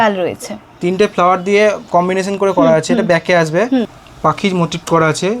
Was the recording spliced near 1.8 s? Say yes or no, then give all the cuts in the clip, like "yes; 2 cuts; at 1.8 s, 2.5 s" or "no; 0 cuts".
no; 1 cut; at 4.0 s